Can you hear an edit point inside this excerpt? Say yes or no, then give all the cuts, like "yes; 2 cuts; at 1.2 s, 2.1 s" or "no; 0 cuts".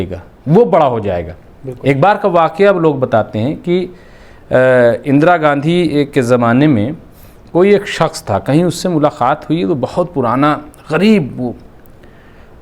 no; 0 cuts